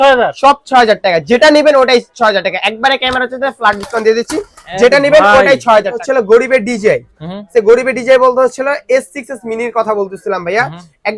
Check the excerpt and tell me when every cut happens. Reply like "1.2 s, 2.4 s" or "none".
6.0 s